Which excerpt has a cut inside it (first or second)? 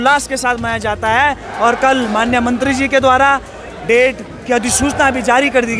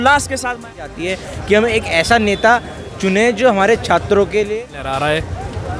second